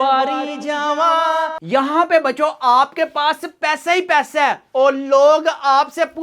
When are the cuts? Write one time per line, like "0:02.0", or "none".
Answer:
0:01.6